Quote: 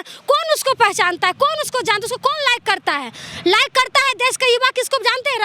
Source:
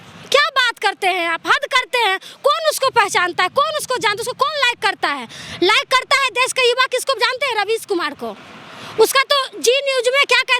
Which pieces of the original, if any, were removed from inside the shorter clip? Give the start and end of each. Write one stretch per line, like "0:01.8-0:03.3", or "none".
none